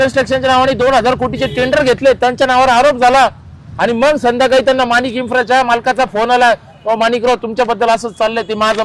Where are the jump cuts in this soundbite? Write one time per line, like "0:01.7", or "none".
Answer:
none

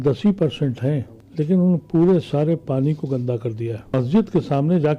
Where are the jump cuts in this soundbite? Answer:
0:01.2
0:03.9

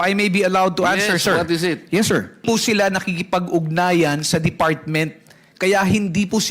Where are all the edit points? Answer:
0:02.4

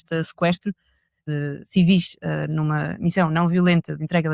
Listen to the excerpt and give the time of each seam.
0:01.2

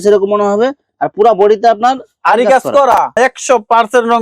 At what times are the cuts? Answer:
0:03.1

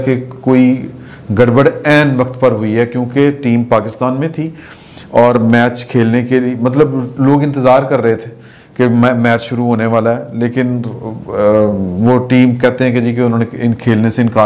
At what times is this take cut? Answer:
none

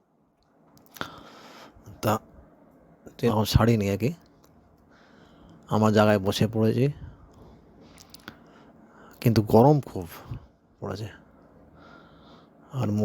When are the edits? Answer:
0:03.3

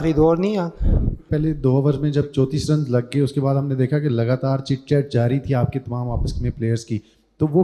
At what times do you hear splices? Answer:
0:01.3

